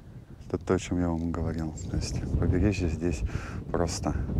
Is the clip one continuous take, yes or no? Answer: yes